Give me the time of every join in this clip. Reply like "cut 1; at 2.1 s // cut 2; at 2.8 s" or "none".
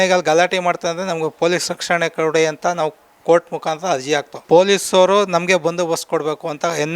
cut 1; at 4.3 s